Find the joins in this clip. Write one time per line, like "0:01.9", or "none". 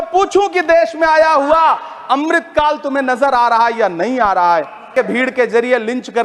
0:04.9

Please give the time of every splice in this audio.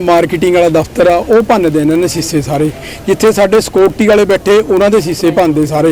none

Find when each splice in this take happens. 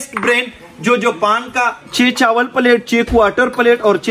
0:01.8

